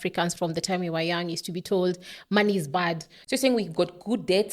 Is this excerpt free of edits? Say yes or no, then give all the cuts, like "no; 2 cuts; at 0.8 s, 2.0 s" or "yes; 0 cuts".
no; 1 cut; at 3.1 s